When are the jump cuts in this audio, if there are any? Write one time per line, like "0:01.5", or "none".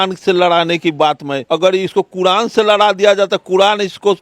0:01.3

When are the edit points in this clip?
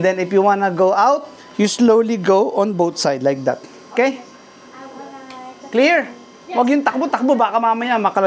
none

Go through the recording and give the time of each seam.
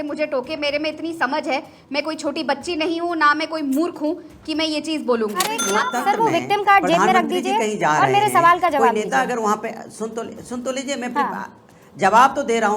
0:05.5

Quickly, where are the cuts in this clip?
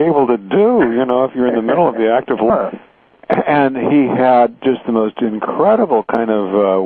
none

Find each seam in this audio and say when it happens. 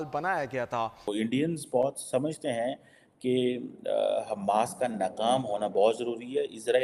0:01.0

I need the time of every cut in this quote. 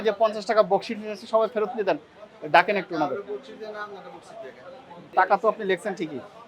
none

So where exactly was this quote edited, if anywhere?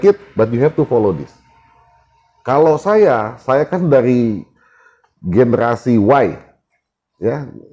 none

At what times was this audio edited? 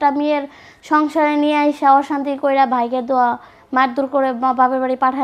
none

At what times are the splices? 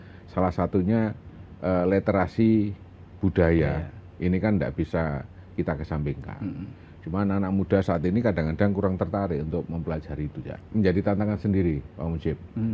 0:10.6

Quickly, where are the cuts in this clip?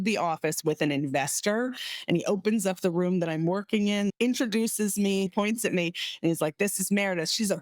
0:04.1
0:05.3

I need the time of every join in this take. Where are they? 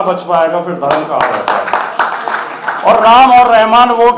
none

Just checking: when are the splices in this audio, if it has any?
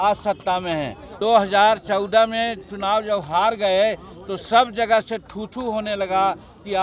0:01.1

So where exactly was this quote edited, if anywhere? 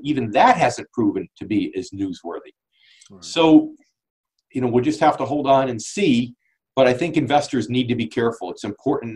none

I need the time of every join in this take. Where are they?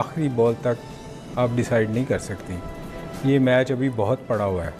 none

